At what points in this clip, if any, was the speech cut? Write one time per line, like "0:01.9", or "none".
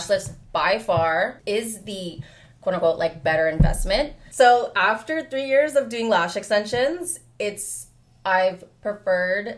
0:01.4
0:04.2